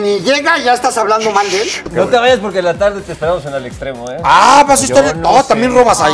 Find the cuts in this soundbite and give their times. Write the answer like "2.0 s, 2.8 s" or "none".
1.9 s